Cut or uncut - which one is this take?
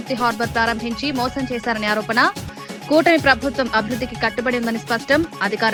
uncut